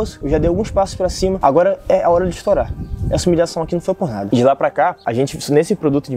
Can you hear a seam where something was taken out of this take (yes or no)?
yes